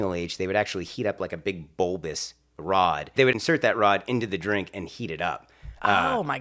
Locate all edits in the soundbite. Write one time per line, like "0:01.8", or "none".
0:03.3